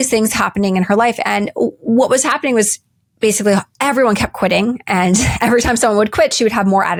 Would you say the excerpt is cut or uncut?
uncut